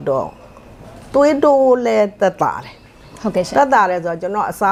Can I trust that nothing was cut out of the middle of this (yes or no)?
yes